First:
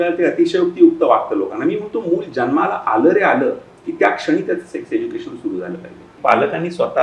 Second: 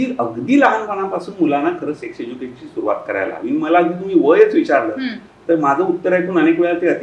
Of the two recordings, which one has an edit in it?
first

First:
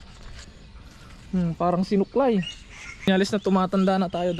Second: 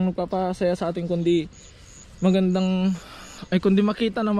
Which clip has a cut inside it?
first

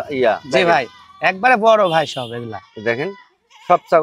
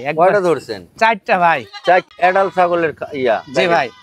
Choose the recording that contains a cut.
second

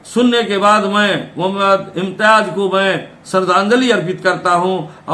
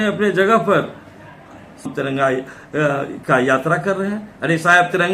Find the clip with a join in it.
second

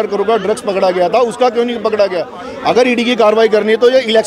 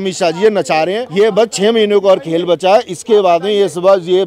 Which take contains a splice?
second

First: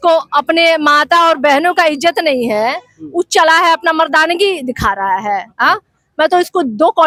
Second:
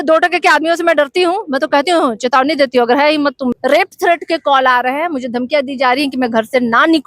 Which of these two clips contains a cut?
second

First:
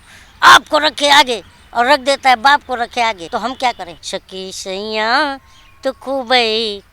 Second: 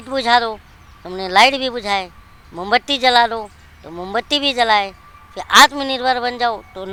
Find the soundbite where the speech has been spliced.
first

